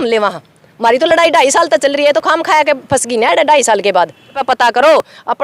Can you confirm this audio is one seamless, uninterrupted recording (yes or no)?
no